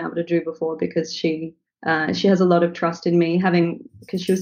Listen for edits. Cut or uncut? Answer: uncut